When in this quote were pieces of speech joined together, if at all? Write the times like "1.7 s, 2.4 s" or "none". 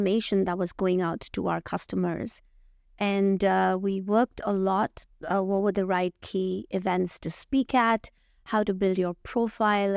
none